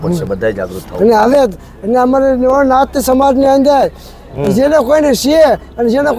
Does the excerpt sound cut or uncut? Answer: uncut